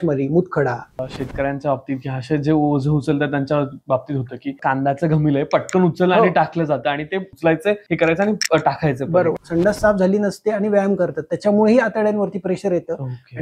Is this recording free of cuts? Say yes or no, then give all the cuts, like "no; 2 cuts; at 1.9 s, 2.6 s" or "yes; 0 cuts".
no; 4 cuts; at 1.1 s, 4.6 s, 7.7 s, 9.4 s